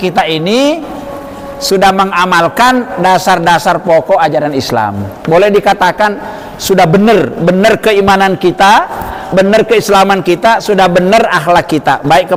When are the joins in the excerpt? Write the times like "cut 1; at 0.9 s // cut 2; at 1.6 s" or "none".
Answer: none